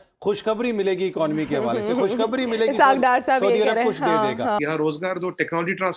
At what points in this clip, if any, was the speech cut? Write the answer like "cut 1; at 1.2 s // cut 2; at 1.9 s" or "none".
cut 1; at 4.6 s